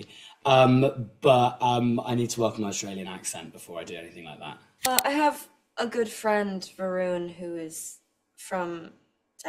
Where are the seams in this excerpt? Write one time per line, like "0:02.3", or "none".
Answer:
0:04.9